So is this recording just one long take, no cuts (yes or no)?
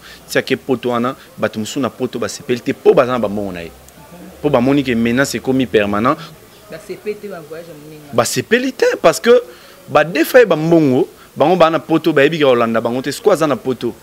no